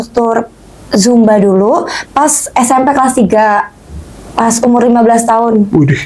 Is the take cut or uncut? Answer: uncut